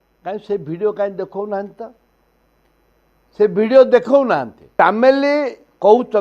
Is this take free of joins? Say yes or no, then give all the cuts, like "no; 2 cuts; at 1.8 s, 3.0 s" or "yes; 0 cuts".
no; 1 cut; at 4.8 s